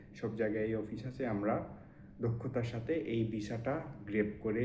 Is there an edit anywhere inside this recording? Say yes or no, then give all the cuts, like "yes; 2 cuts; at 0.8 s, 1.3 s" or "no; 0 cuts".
no; 0 cuts